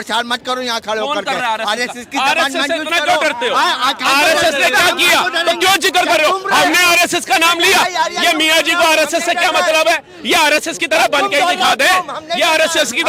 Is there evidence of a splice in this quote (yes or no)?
no